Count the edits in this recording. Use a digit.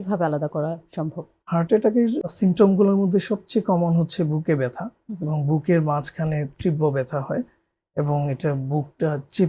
2